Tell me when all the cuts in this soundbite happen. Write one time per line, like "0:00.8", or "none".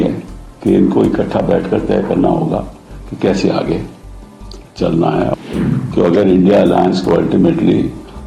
0:05.3